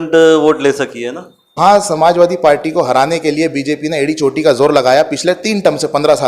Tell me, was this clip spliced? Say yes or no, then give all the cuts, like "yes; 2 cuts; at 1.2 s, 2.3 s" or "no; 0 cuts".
yes; 1 cut; at 1.6 s